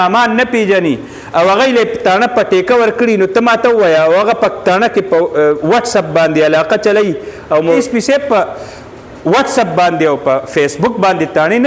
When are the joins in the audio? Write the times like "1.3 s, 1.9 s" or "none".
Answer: 7.8 s